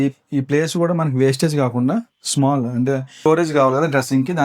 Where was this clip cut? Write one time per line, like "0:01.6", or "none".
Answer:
0:03.2